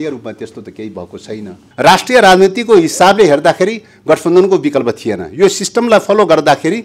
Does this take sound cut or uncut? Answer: cut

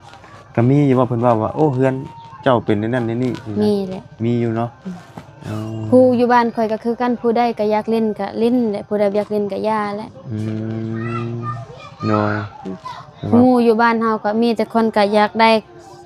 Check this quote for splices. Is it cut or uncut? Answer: uncut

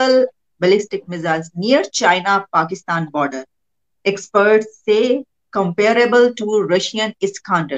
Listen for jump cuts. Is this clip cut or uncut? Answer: uncut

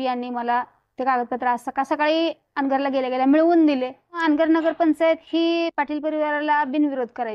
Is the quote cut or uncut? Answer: cut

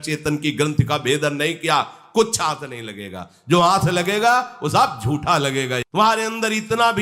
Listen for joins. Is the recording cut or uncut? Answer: cut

